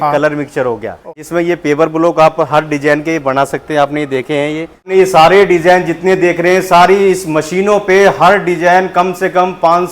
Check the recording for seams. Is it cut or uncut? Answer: cut